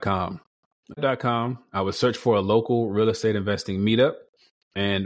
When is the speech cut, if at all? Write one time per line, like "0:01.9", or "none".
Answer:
0:01.0